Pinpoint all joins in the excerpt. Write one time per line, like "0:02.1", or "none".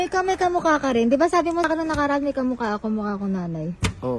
0:01.7